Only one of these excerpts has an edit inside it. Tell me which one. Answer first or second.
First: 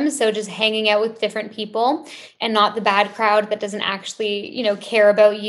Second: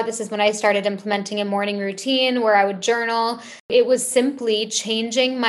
second